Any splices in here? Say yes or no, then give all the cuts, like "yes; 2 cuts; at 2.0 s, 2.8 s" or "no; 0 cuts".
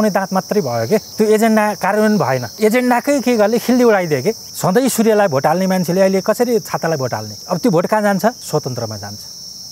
yes; 5 cuts; at 1.1 s, 2.5 s, 4.5 s, 7.3 s, 8.4 s